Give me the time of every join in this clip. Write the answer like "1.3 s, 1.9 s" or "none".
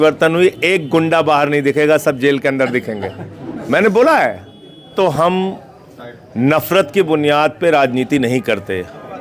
4.9 s